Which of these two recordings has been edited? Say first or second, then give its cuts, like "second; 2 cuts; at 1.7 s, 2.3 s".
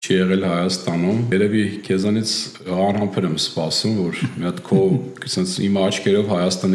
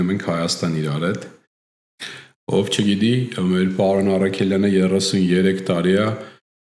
first; 1 cut; at 1.3 s